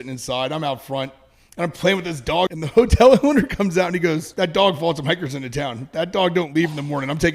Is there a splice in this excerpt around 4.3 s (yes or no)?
yes